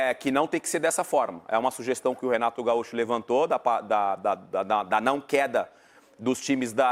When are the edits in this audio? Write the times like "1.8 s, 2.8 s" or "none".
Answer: none